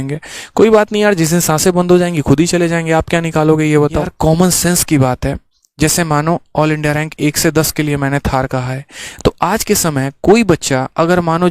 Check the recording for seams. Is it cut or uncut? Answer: cut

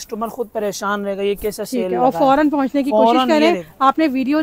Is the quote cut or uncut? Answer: uncut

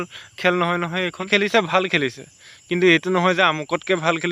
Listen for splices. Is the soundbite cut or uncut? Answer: cut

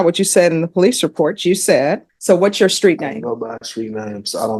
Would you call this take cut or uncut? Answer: cut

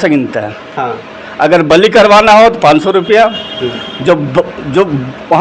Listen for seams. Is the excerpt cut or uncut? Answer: uncut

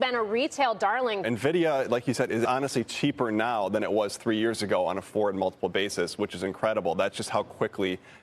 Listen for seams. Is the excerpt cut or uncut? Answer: cut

